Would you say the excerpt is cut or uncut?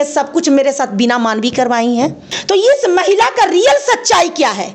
cut